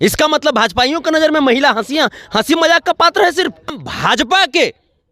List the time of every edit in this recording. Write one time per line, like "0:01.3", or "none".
0:03.8